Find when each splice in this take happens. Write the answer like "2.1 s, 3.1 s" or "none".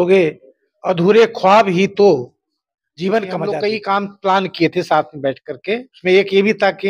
3.6 s